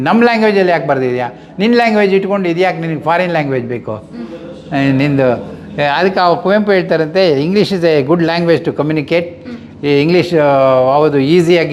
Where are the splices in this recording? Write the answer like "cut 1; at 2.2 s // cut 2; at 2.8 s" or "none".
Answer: none